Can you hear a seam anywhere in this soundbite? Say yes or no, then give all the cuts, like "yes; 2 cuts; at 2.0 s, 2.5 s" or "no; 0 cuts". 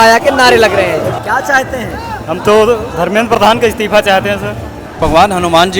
yes; 2 cuts; at 1.1 s, 4.9 s